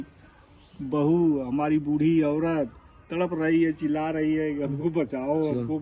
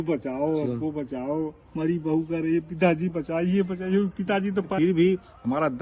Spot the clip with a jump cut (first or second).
second